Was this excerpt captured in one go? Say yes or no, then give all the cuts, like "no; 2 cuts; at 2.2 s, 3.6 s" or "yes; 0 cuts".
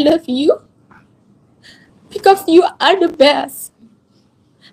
yes; 0 cuts